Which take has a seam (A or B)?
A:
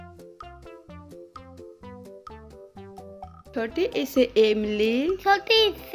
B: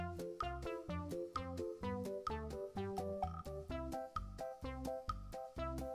A